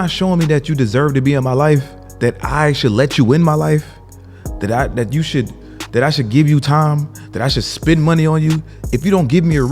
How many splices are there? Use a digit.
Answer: 1